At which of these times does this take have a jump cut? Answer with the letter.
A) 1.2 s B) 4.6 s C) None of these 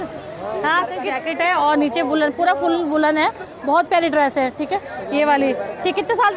A